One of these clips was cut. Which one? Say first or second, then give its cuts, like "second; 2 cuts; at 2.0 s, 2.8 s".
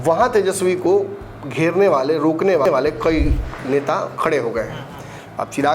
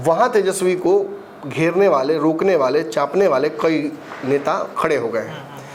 first; 1 cut; at 2.7 s